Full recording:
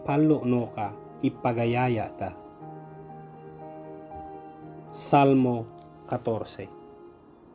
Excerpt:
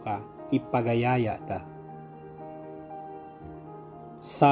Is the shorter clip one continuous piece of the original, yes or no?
yes